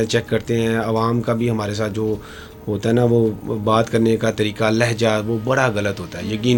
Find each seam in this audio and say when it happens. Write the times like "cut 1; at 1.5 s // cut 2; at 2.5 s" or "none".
none